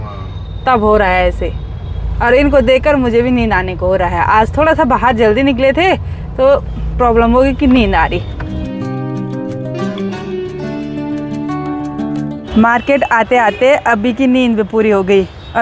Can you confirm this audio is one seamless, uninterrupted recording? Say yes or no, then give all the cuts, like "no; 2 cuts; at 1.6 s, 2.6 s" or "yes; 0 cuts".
yes; 0 cuts